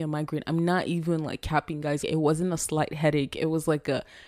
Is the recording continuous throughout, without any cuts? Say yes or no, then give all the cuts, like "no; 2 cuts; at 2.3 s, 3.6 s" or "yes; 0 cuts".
no; 1 cut; at 2.0 s